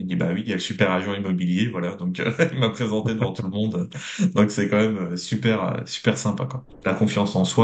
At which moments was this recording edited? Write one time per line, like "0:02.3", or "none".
0:06.6